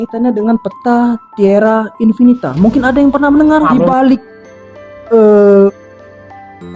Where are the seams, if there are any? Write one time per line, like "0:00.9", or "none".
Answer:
0:03.7